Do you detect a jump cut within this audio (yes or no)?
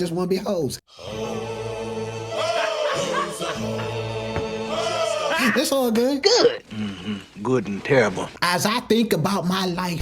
yes